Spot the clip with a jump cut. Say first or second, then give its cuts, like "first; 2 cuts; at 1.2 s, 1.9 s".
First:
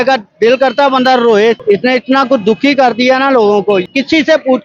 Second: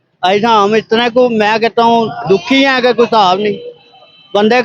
first; 2 cuts; at 1.6 s, 3.8 s